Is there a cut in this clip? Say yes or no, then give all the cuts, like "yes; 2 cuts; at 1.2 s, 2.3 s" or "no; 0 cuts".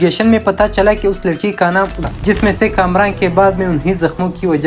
yes; 1 cut; at 2.1 s